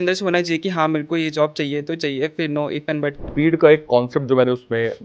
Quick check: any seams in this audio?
yes; 1 cut; at 3.2 s

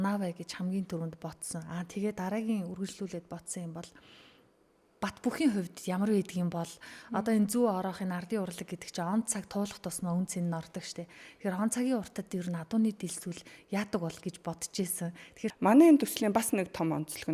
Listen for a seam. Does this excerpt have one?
yes; 1 cut; at 15.4 s

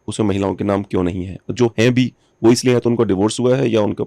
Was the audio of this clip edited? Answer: no; 0 cuts

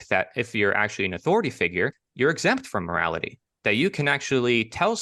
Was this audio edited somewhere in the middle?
yes; 1 cut; at 2.0 s

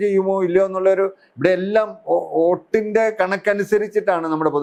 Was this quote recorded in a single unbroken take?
yes; 0 cuts

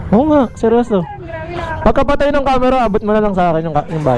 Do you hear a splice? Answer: no; 0 cuts

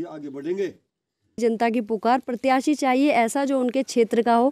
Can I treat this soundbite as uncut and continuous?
no; 1 cut; at 1.4 s

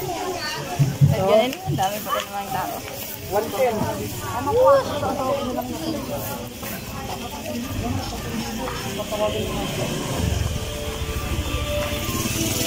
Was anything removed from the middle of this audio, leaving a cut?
no; 0 cuts

